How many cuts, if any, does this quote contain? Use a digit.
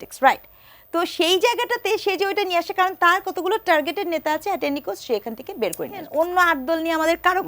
1